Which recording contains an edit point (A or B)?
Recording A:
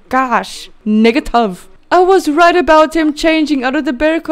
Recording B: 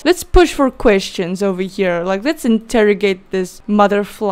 A